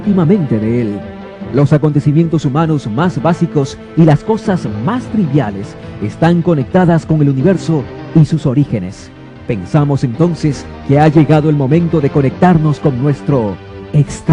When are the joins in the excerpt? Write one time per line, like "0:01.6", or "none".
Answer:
0:08.4